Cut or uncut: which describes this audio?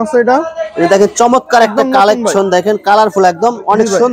uncut